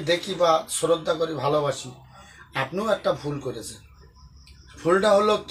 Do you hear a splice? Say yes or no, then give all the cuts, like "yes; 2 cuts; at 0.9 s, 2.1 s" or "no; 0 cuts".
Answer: no; 0 cuts